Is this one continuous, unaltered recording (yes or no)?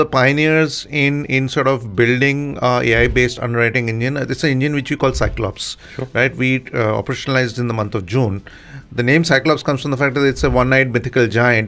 yes